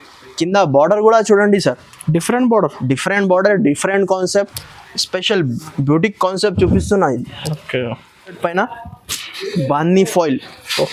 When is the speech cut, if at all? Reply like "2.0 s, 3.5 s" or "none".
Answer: 8.4 s